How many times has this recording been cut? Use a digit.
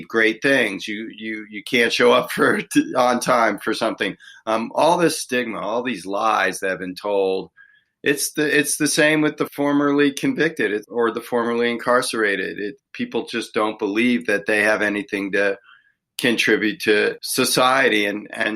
4